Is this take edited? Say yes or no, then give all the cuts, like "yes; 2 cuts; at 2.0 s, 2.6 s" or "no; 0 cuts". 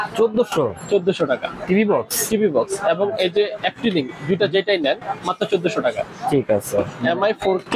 no; 0 cuts